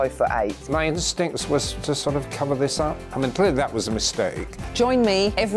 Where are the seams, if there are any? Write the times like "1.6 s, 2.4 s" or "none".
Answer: none